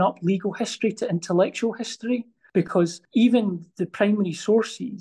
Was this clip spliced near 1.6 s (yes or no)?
no